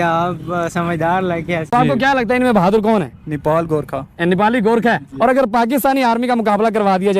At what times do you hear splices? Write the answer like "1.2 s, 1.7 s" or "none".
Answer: 1.7 s